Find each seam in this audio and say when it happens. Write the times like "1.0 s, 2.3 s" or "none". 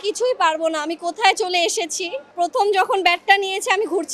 2.3 s